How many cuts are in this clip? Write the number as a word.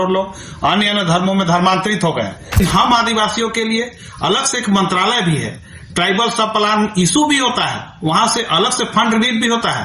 one